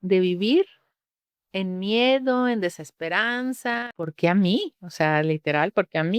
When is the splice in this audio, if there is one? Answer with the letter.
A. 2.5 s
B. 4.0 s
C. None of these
B